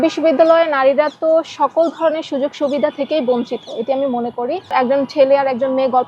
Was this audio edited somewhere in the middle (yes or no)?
yes